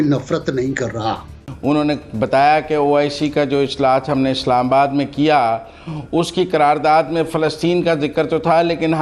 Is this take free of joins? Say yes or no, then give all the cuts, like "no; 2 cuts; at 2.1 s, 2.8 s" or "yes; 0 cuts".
no; 1 cut; at 1.5 s